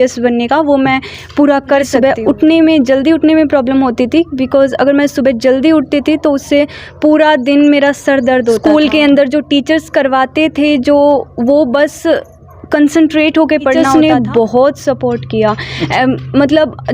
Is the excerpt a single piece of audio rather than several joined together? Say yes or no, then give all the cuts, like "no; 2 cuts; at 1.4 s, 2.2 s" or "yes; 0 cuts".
no; 3 cuts; at 1.9 s, 8.6 s, 13.8 s